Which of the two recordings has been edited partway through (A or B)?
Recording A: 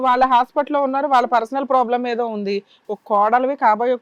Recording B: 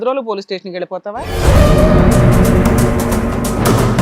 B